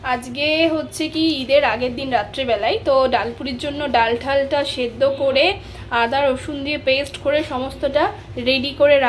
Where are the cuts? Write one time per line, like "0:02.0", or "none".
none